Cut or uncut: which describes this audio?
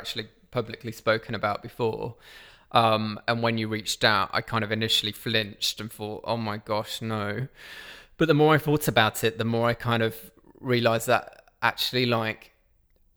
uncut